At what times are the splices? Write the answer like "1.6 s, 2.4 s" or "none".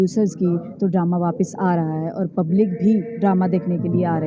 none